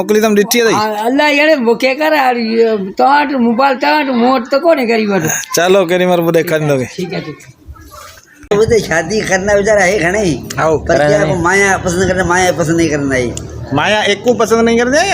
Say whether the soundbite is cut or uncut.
cut